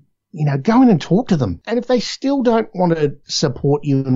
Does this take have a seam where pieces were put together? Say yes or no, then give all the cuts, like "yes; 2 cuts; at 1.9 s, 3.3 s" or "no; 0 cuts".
yes; 2 cuts; at 1.6 s, 3.2 s